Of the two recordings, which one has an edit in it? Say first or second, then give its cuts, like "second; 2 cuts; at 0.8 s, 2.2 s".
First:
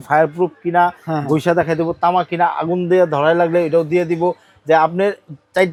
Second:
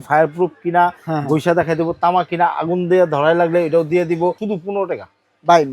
second; 1 cut; at 4.4 s